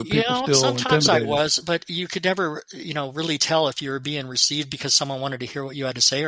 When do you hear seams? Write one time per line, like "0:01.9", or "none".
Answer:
none